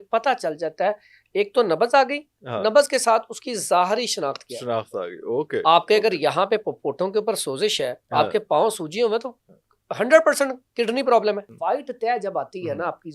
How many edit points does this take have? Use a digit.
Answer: 1